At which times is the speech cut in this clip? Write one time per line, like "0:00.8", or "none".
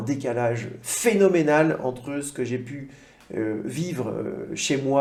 none